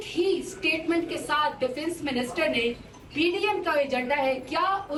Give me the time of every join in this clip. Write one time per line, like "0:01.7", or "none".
none